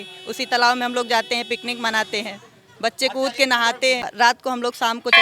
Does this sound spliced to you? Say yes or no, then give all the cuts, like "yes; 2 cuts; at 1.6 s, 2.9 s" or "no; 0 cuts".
yes; 1 cut; at 4.1 s